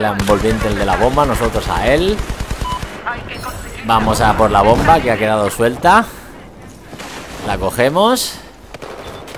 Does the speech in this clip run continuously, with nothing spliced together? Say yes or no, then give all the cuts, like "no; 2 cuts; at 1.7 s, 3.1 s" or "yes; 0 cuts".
yes; 0 cuts